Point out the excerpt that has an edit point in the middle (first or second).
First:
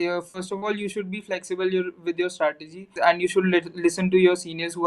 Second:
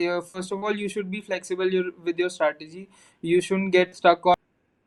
first